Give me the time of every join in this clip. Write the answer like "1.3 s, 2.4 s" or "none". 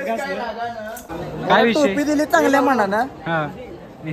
1.1 s

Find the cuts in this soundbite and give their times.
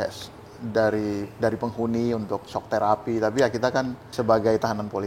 4.0 s

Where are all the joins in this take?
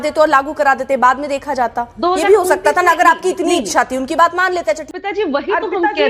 4.9 s

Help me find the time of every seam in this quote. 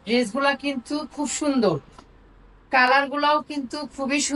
none

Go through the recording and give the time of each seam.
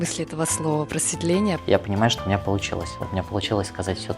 1.6 s

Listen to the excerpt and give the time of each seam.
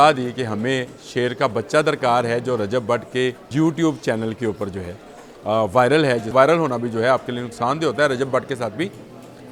3.4 s, 6.3 s

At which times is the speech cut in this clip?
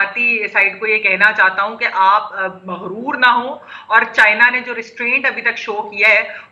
none

